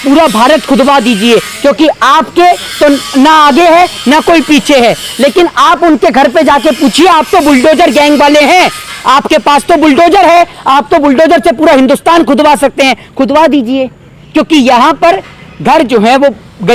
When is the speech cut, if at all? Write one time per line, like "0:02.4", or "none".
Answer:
none